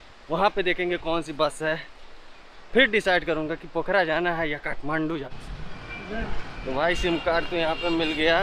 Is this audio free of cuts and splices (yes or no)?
no